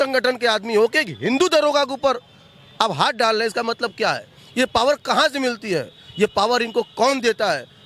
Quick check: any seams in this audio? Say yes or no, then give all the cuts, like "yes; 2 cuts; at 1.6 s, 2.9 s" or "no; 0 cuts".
no; 0 cuts